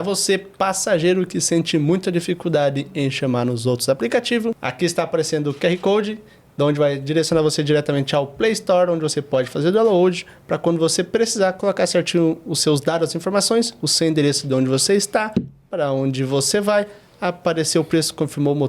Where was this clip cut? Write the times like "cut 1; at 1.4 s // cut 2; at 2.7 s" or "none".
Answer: cut 1; at 4.7 s